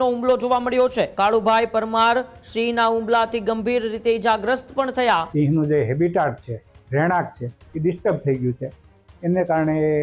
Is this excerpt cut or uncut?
cut